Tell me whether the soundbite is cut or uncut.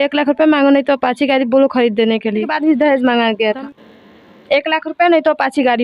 cut